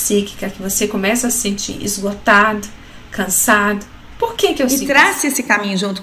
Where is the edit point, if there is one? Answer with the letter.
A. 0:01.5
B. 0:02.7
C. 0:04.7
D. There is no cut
C